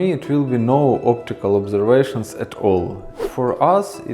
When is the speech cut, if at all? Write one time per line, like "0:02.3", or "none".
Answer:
0:03.2